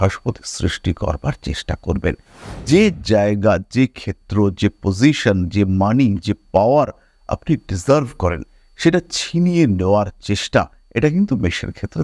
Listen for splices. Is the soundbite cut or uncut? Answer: uncut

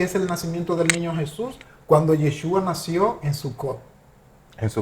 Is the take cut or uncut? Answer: uncut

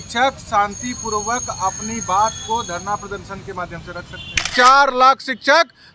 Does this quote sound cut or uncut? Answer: cut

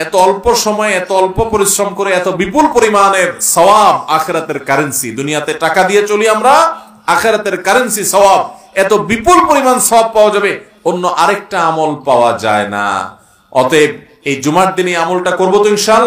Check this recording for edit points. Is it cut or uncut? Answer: uncut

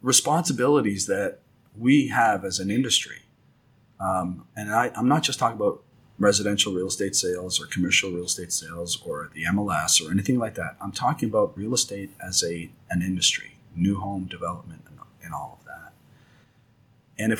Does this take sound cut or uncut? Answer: uncut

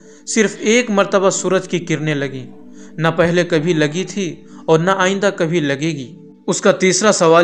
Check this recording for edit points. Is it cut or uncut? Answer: cut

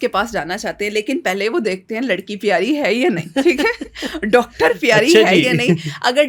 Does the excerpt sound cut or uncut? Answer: uncut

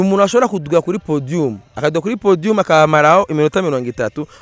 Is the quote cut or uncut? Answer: uncut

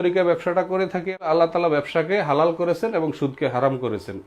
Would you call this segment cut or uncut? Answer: cut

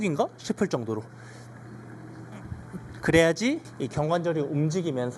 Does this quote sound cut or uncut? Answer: cut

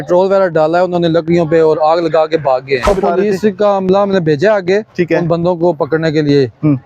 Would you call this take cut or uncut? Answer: cut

